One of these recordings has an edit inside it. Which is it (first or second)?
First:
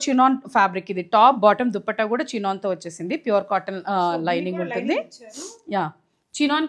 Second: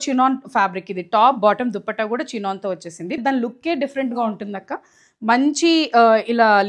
second